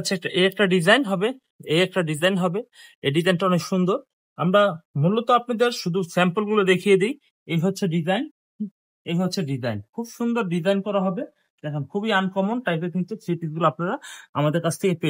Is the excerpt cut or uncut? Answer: uncut